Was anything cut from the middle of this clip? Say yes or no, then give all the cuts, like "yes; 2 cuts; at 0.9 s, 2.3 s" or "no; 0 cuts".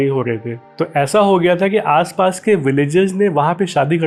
no; 0 cuts